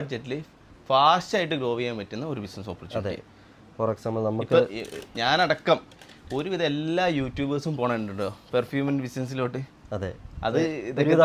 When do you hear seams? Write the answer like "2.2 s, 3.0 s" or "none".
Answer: none